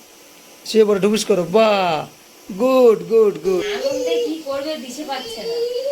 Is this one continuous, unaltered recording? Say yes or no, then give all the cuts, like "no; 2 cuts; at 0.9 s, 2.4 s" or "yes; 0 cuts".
no; 1 cut; at 3.6 s